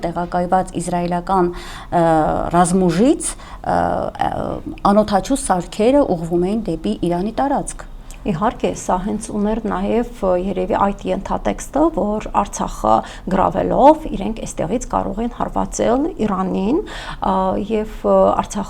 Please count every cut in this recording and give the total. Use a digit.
0